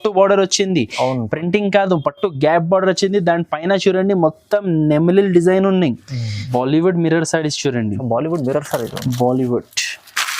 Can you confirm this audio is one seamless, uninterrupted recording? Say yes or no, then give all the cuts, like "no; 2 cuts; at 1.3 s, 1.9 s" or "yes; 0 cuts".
no; 1 cut; at 6.4 s